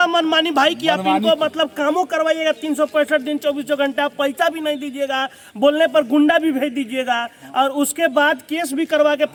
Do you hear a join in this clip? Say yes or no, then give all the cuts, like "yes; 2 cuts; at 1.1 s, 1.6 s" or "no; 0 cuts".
no; 0 cuts